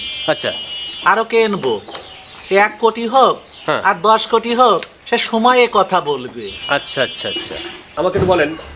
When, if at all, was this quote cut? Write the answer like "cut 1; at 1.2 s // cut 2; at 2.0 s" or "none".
none

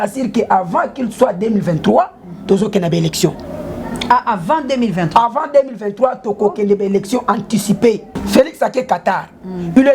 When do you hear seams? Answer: cut 1; at 8.1 s

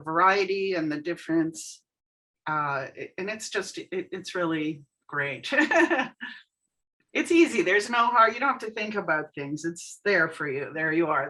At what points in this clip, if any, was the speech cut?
none

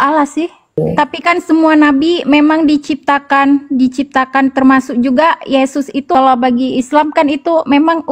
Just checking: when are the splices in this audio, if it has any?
cut 1; at 0.8 s // cut 2; at 6.1 s

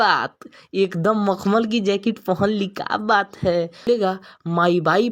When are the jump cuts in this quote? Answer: cut 1; at 3.9 s

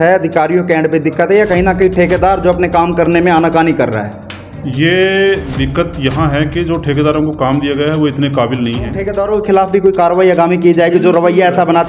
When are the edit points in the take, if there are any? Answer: cut 1; at 9.0 s

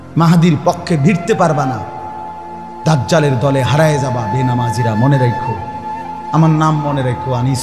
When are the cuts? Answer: none

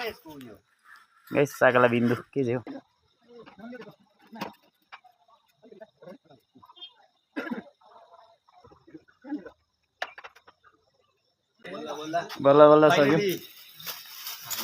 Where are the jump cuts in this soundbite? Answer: cut 1; at 2.8 s // cut 2; at 8.8 s // cut 3; at 11.6 s

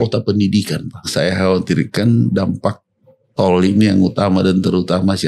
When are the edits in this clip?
cut 1; at 1.1 s

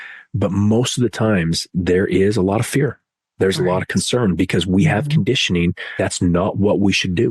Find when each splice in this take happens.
cut 1; at 5.9 s

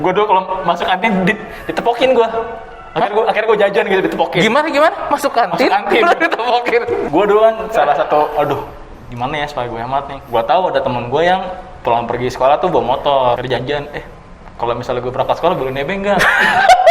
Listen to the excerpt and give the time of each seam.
cut 1; at 7.0 s // cut 2; at 10.2 s // cut 3; at 13.4 s

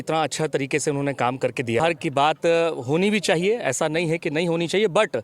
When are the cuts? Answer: cut 1; at 1.8 s

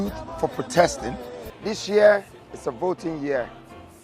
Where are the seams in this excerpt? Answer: cut 1; at 1.4 s

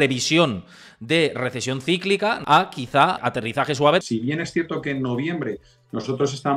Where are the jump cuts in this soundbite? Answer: cut 1; at 2.4 s // cut 2; at 3.2 s // cut 3; at 4.0 s

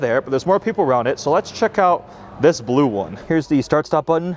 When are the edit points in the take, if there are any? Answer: cut 1; at 3.1 s

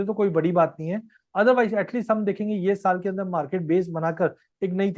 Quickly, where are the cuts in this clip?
none

